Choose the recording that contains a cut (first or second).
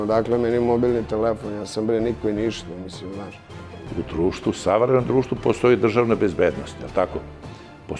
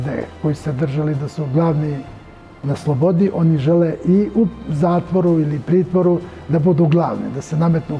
first